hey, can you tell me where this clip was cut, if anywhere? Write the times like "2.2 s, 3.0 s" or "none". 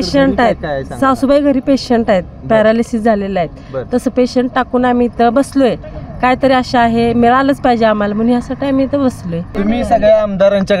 9.5 s